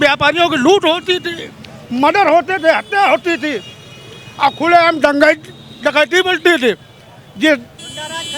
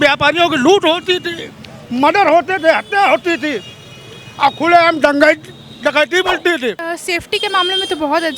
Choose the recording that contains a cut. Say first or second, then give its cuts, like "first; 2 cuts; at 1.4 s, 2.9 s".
second; 1 cut; at 6.9 s